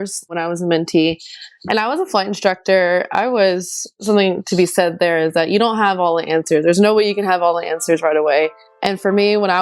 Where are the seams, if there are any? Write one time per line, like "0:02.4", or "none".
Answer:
0:04.0
0:08.7

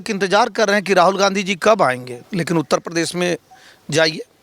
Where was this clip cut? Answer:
0:02.2

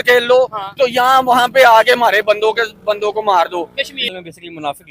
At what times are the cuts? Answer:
0:04.0

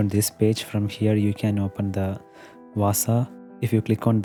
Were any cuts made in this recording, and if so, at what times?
none

